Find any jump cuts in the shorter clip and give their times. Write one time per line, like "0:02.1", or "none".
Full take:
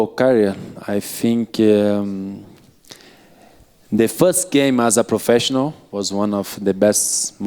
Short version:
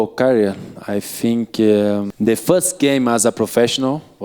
0:02.1